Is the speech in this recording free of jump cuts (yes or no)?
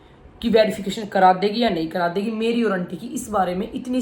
yes